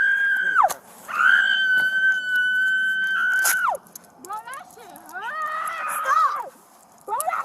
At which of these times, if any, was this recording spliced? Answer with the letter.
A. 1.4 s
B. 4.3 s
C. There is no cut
A